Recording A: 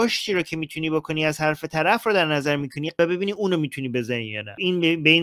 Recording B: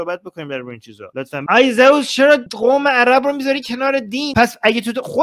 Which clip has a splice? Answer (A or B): B